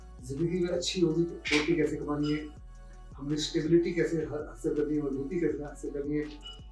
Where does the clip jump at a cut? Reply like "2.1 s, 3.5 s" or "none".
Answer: none